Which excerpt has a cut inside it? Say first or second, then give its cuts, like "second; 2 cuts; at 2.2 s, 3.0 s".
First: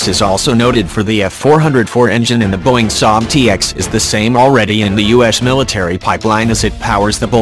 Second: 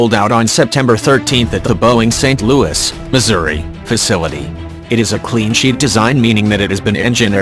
second; 1 cut; at 1.3 s